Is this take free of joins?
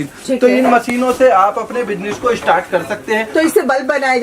yes; 0 cuts

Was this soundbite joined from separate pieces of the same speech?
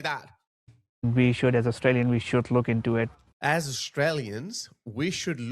yes; 1 cut; at 3.2 s

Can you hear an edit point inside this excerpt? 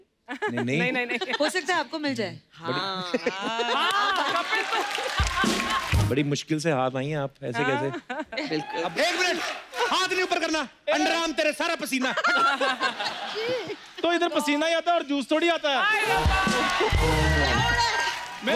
yes; 2 cuts; at 6.1 s, 8.9 s

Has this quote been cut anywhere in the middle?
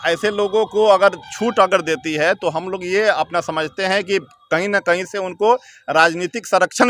no; 0 cuts

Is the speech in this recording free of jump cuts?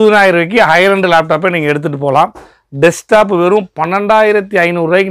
yes; 0 cuts

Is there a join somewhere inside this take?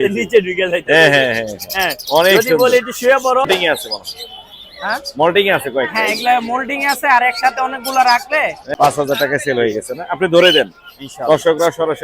yes; 2 cuts; at 3.5 s, 8.7 s

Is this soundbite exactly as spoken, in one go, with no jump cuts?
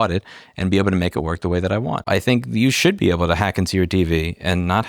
no; 1 cut; at 2.1 s

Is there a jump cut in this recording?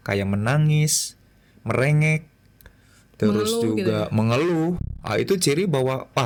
no; 0 cuts

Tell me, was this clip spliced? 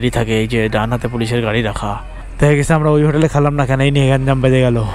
no; 0 cuts

